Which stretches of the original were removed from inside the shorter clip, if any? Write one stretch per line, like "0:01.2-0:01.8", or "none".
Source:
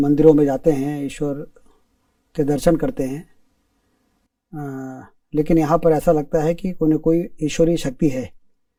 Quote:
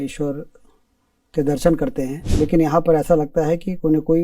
0:03.2-0:05.2